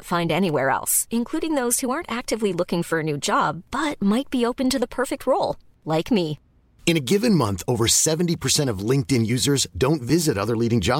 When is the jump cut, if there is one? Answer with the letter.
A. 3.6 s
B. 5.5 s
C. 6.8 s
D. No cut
D